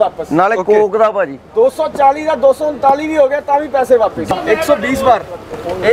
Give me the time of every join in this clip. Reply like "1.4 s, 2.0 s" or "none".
4.3 s